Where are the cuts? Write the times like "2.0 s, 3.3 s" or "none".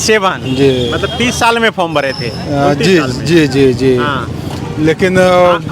none